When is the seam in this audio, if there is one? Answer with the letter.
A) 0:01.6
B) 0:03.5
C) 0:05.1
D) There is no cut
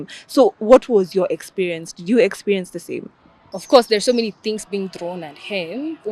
B